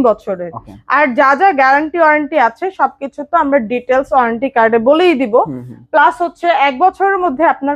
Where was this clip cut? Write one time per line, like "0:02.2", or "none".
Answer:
none